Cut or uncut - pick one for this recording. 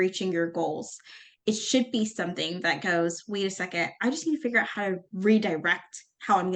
uncut